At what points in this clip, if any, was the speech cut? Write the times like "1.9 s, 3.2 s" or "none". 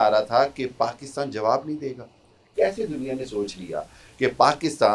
none